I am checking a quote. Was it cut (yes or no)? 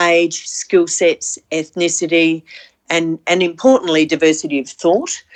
no